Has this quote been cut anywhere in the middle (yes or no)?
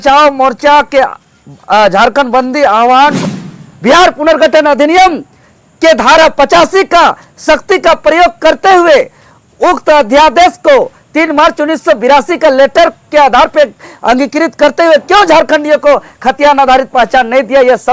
yes